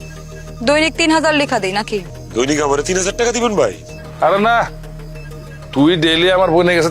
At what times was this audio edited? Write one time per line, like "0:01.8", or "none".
0:02.2

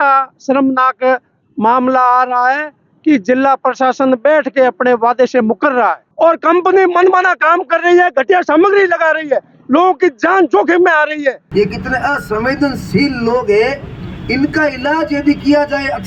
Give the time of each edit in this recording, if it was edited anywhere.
0:06.0
0:11.4

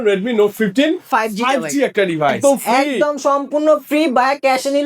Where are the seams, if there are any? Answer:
0:02.4

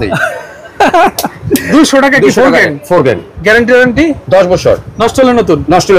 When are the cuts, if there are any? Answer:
0:01.6
0:03.4

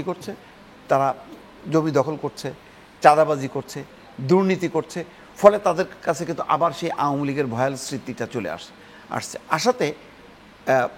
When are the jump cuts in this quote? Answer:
none

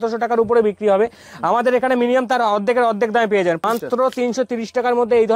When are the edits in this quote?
0:03.6

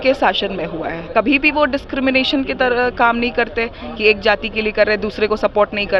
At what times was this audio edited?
0:01.0

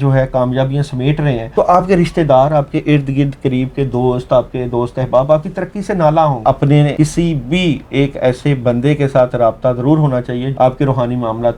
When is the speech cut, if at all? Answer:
0:01.4
0:06.8
0:10.5

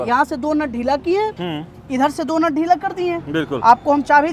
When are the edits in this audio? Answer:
none

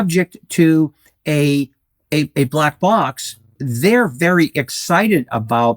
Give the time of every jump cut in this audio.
0:03.6

